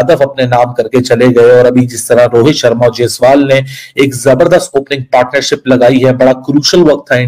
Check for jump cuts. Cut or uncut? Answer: uncut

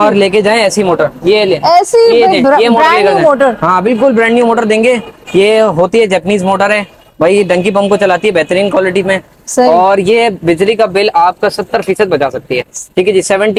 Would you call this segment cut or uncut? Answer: uncut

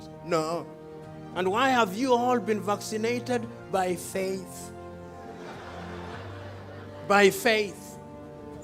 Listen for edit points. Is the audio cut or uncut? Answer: cut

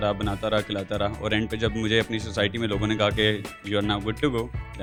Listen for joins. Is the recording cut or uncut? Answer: uncut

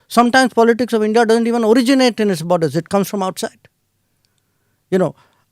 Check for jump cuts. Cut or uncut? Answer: uncut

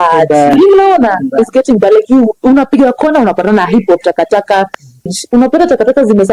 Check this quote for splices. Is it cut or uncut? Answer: cut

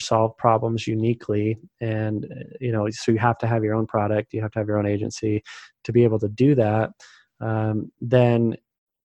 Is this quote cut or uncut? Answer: uncut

